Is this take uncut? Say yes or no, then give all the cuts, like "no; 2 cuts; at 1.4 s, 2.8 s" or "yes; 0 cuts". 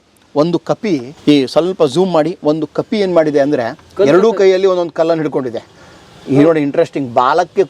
no; 1 cut; at 1.1 s